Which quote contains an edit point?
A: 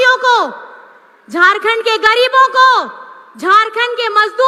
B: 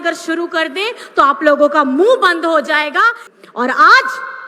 B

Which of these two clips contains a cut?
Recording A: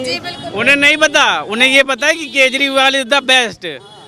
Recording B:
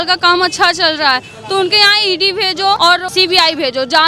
B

